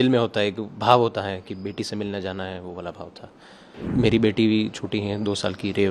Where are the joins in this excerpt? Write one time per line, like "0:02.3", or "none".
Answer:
0:03.8

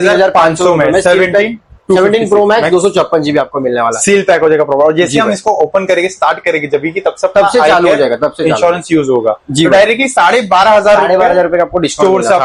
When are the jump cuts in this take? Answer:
none

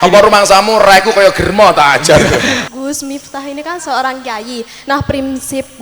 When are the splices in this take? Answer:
0:02.6

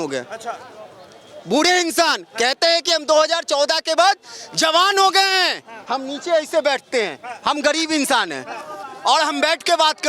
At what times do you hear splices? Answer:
0:05.8

